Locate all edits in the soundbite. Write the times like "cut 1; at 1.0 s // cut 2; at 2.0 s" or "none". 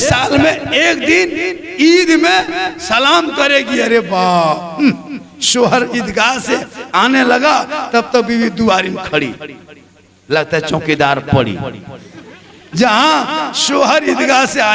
none